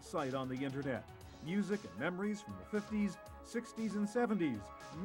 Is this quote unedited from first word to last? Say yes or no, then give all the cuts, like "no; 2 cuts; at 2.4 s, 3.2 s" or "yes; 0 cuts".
yes; 0 cuts